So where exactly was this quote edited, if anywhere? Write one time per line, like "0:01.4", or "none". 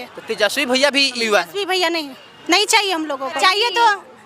0:01.2
0:03.4

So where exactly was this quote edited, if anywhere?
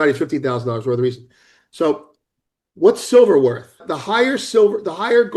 0:03.9

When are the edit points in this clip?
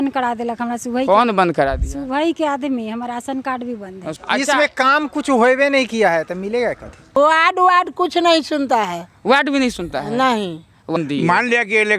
0:04.2
0:07.2
0:11.0

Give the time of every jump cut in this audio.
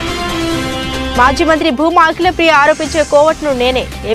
0:01.1

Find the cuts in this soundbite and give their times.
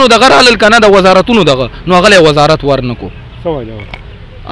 none

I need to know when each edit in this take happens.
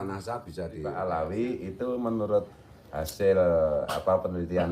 0:00.9

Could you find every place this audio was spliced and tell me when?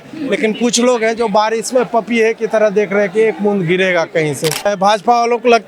0:04.6

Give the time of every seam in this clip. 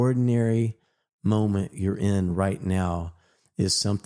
none

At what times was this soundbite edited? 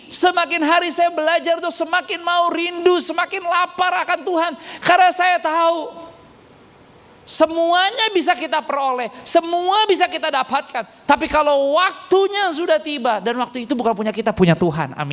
none

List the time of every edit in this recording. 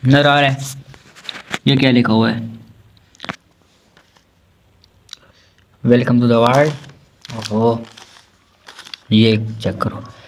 none

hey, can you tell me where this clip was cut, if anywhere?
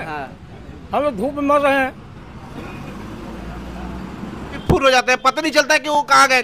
0:04.6

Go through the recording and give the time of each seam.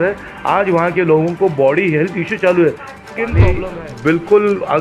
0:03.5

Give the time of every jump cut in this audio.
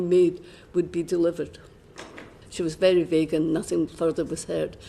0:02.4

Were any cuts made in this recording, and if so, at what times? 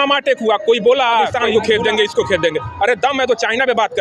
0:01.4

